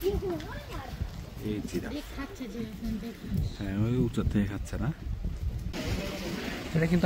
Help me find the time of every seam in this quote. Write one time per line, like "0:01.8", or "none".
0:05.7